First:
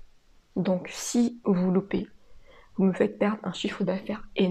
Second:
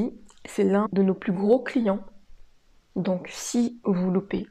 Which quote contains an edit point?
second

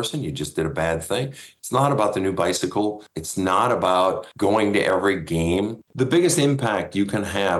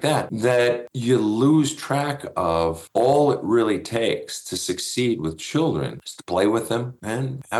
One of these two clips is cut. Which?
first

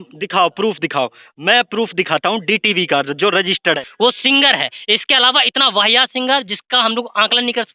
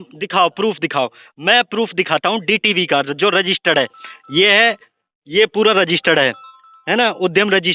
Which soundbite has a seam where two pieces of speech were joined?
first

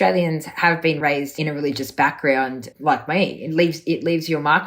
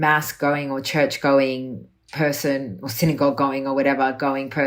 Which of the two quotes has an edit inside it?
first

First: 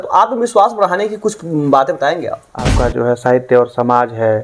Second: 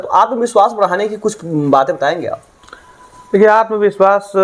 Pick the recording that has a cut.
first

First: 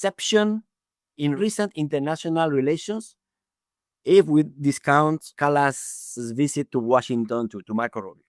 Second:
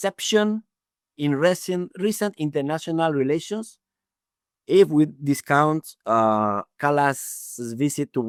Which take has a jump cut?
first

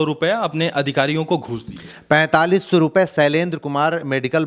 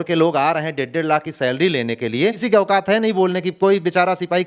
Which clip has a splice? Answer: second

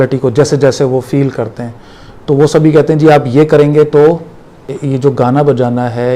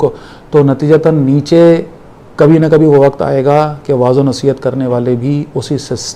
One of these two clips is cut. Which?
first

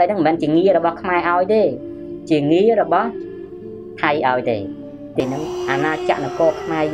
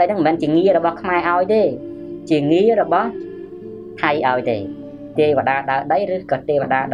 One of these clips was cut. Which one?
first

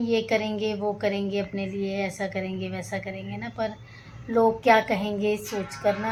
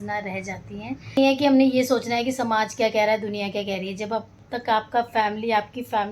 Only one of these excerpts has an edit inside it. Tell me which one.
second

